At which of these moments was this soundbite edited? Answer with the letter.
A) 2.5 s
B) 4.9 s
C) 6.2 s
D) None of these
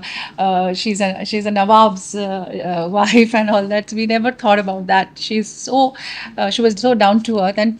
D